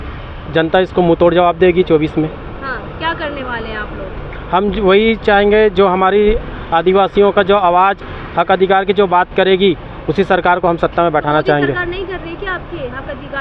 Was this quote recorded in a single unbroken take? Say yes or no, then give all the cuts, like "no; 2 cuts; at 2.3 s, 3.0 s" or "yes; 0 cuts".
yes; 0 cuts